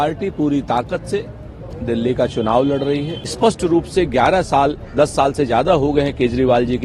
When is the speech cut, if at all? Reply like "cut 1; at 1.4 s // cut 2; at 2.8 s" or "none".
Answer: cut 1; at 3.2 s